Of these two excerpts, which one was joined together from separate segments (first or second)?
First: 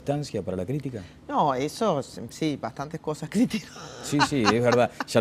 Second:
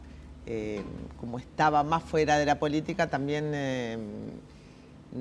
first